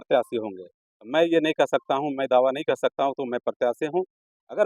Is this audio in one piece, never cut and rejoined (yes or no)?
yes